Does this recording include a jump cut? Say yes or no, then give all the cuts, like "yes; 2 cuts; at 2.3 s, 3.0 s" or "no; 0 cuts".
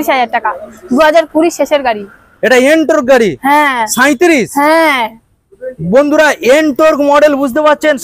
no; 0 cuts